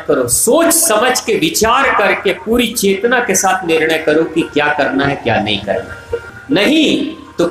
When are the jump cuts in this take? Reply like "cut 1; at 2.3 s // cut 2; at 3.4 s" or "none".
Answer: cut 1; at 6.3 s